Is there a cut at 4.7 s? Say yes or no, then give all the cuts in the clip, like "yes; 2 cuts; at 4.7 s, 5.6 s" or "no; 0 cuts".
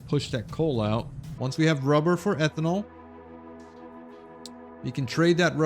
no; 1 cut; at 1.2 s